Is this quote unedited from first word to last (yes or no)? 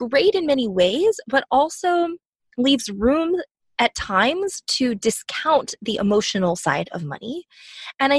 yes